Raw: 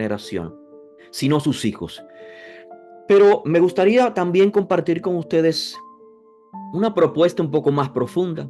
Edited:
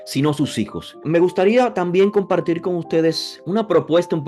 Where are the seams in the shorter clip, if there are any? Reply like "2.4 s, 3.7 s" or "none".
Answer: 1.0 s, 3.3 s